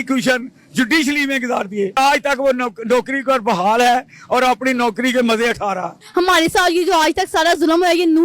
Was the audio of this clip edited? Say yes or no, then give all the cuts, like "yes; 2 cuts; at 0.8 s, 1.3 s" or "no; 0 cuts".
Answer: yes; 2 cuts; at 2.0 s, 6.0 s